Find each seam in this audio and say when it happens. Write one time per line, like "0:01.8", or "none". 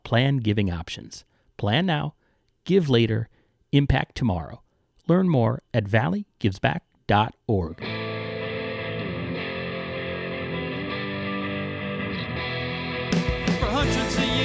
0:07.9